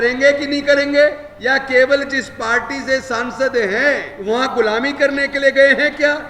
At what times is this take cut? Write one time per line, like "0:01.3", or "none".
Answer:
0:01.3
0:04.1